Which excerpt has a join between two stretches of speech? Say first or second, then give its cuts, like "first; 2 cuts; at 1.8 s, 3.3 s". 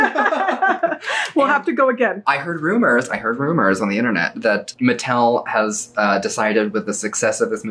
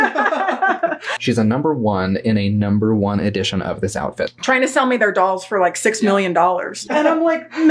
second; 2 cuts; at 1.1 s, 4.3 s